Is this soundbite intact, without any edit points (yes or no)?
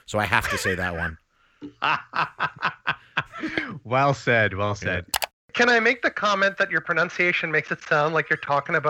no